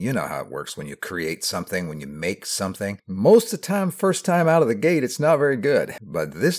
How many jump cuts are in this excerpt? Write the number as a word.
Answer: zero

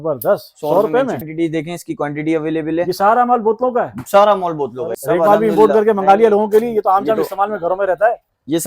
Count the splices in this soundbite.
two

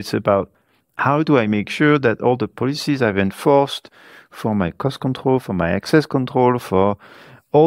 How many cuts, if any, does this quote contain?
zero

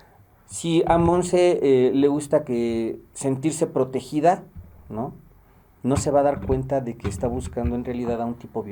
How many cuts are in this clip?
zero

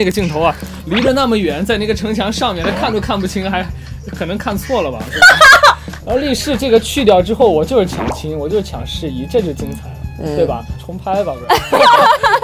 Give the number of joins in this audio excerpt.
two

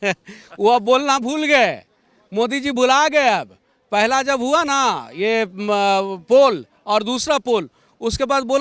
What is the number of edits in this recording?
zero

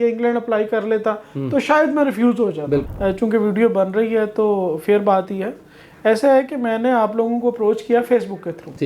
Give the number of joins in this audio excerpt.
one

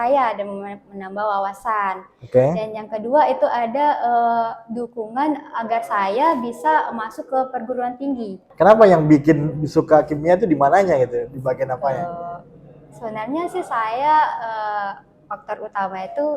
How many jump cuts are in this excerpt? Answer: one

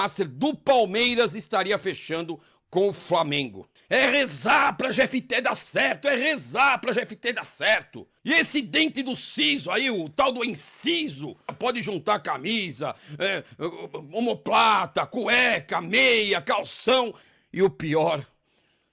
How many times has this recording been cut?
zero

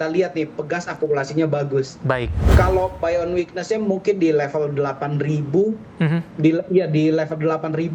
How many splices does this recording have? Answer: one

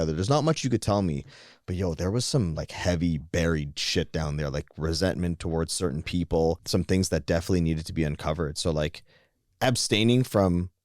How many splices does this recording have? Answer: one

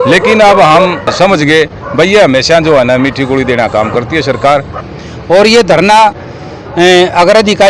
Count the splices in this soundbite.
two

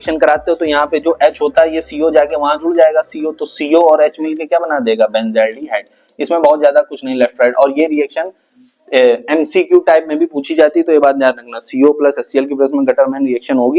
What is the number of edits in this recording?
zero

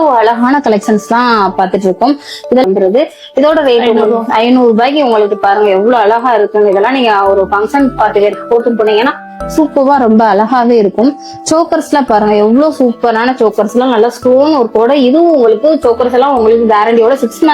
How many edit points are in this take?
one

